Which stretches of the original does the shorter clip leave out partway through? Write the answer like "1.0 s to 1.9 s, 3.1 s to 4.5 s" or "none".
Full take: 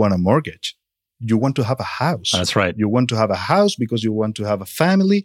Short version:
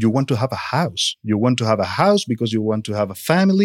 2.5 s to 2.7 s